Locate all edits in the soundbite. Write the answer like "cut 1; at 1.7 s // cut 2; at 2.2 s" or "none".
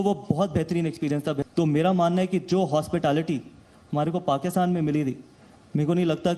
cut 1; at 1.4 s